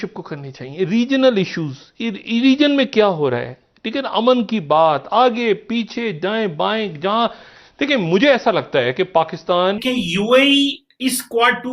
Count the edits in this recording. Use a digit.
1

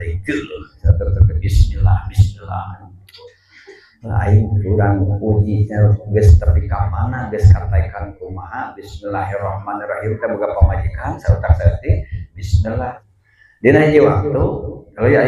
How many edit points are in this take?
1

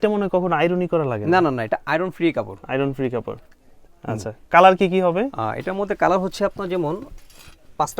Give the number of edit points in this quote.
0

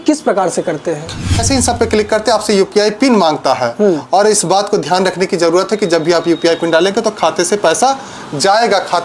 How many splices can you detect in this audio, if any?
1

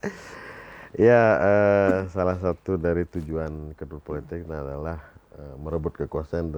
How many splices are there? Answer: 0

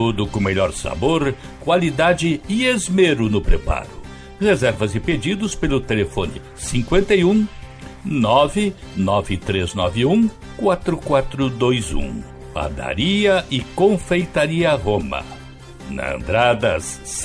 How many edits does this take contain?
0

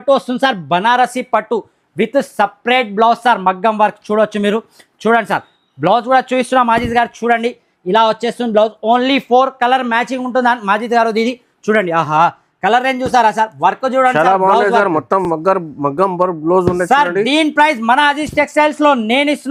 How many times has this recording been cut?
0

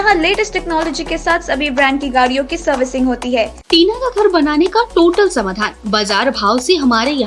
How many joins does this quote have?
1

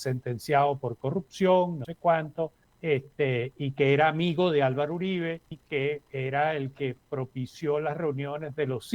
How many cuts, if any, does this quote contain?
2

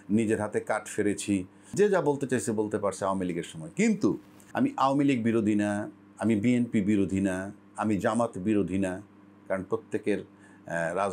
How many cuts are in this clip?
2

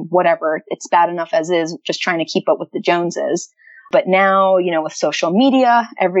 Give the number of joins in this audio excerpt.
1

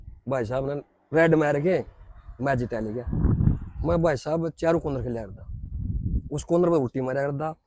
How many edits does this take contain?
1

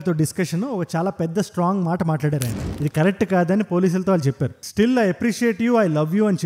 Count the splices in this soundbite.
1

